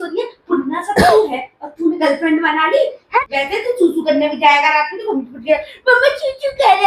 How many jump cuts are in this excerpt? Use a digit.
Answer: 1